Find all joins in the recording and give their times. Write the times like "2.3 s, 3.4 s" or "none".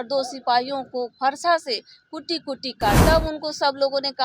3.0 s